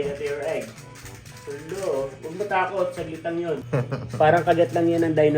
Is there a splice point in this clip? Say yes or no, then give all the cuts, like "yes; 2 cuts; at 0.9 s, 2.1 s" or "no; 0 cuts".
yes; 1 cut; at 3.6 s